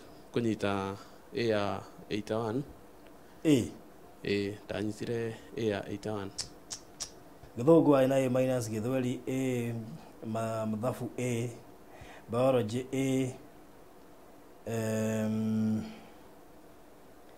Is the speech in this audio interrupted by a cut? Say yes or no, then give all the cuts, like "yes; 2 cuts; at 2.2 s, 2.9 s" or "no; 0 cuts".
yes; 1 cut; at 7.4 s